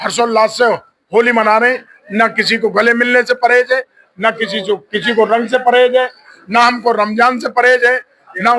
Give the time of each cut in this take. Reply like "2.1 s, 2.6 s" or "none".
none